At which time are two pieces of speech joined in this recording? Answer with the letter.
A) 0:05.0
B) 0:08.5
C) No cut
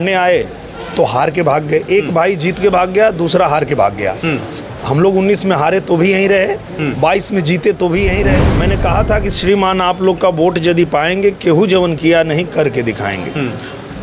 B